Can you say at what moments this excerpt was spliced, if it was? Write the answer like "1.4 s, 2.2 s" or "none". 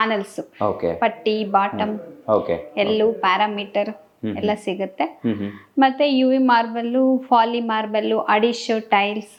none